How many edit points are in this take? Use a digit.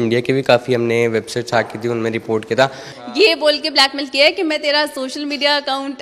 1